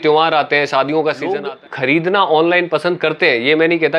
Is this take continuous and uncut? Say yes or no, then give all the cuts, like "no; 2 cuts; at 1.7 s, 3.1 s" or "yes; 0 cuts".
no; 1 cut; at 1.4 s